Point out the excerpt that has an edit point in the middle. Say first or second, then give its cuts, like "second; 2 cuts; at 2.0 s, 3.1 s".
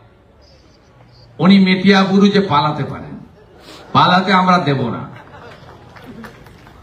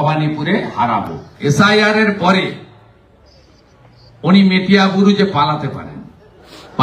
second; 1 cut; at 1.2 s